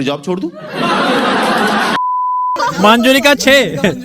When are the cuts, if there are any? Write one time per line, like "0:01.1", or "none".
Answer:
0:02.6